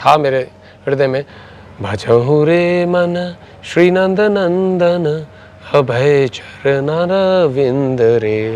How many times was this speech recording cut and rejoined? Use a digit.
1